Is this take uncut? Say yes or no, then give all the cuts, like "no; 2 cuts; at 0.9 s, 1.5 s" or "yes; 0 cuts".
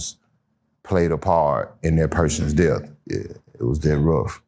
no; 1 cut; at 3.0 s